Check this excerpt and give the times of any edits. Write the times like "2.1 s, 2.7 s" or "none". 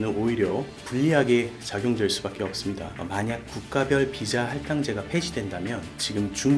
2.9 s

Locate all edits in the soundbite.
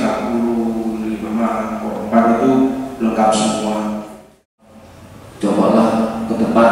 4.5 s

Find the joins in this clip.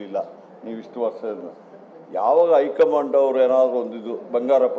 none

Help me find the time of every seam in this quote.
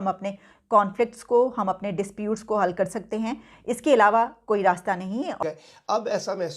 5.3 s

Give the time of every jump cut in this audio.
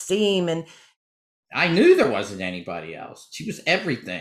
1.0 s

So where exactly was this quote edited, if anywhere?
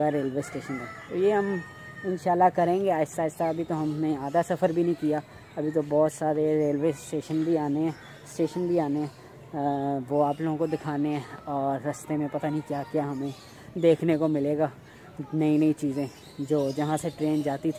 none

